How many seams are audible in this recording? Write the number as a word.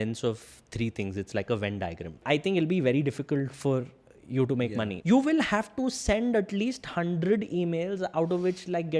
two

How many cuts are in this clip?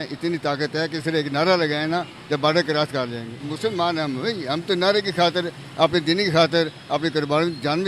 one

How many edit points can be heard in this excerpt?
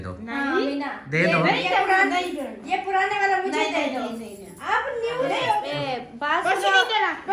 one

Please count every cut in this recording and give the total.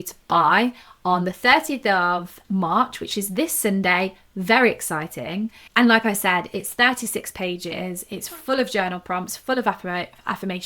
one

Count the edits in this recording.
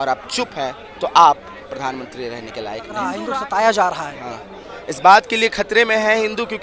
one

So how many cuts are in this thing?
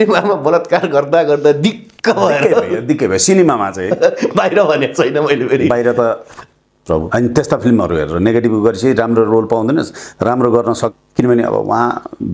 two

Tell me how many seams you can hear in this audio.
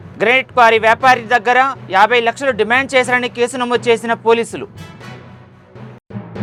zero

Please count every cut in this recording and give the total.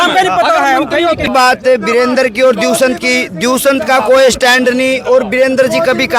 one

